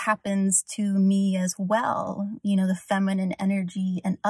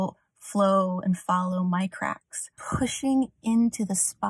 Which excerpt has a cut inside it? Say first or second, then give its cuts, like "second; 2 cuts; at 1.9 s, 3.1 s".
second; 1 cut; at 2.6 s